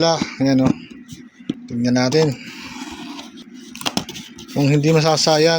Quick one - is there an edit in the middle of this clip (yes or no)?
yes